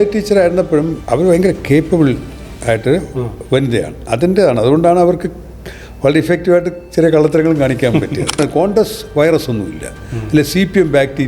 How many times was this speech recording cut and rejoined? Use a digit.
2